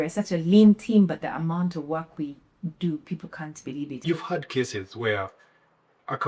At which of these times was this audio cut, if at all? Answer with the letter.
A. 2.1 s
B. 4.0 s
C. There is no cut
B